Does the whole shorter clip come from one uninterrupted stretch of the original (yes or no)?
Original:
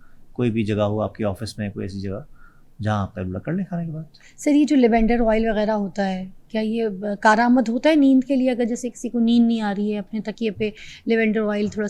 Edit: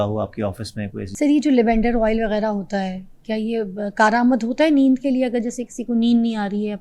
no